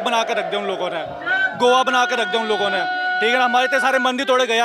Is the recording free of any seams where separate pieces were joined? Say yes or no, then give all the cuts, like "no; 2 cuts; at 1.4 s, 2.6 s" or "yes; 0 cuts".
yes; 0 cuts